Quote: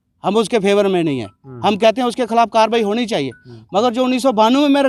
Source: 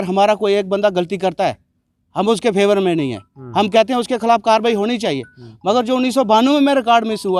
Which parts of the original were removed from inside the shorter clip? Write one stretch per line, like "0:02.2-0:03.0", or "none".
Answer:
none